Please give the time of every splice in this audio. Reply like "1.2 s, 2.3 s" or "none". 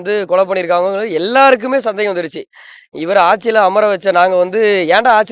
none